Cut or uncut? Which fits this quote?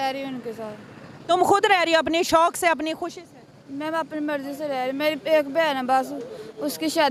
uncut